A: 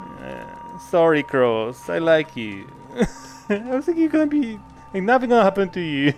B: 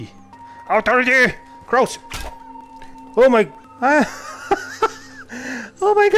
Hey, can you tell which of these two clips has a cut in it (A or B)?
B